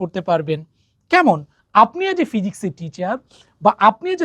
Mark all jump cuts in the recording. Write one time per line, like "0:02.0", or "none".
0:01.5